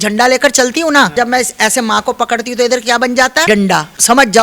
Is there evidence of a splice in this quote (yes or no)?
yes